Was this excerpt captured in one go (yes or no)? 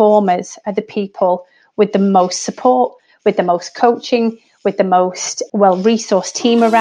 no